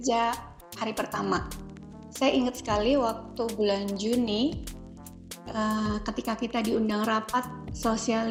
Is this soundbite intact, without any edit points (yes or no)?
yes